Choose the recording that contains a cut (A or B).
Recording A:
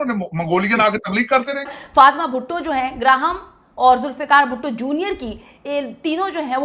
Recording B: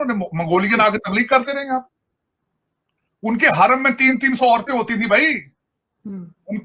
A